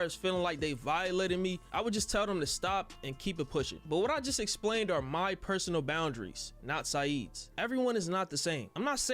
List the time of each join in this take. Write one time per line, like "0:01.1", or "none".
none